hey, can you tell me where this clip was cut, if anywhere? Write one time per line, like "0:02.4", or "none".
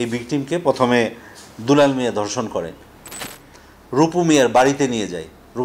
0:03.2